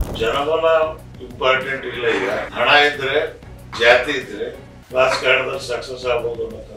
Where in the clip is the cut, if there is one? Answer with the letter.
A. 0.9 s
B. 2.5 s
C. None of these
B